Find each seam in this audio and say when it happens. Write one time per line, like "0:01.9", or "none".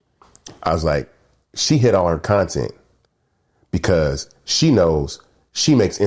none